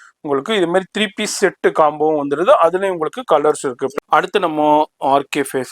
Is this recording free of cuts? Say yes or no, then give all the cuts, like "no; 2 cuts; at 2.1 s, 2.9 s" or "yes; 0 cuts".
no; 1 cut; at 3.9 s